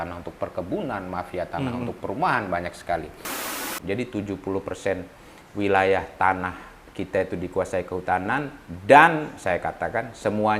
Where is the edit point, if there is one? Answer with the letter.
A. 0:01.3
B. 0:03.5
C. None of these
B